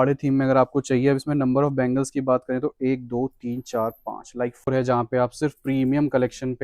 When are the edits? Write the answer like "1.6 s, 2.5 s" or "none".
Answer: 4.7 s